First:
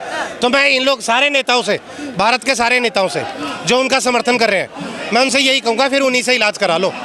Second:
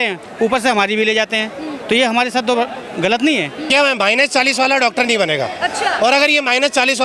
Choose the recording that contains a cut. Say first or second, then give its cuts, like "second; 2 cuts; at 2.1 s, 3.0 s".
second; 1 cut; at 3.6 s